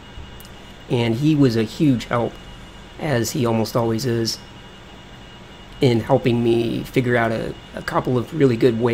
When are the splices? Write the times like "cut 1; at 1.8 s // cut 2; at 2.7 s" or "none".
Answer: cut 1; at 3.3 s